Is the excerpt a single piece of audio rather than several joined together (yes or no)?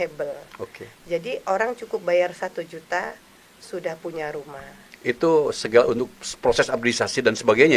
yes